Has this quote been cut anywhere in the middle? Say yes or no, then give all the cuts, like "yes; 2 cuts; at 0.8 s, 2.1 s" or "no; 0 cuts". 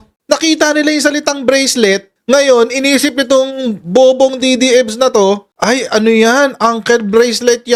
no; 0 cuts